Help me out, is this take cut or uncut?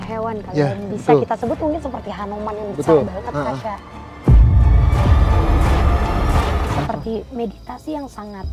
cut